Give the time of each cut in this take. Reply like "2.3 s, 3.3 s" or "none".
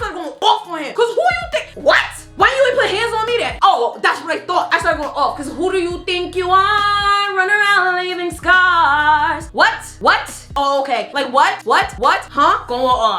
2.3 s, 3.5 s, 4.7 s, 10.4 s